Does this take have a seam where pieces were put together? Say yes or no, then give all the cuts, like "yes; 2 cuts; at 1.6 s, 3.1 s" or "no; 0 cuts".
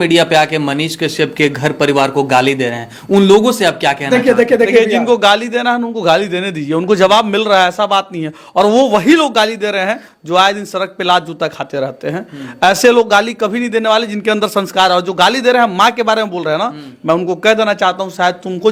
no; 0 cuts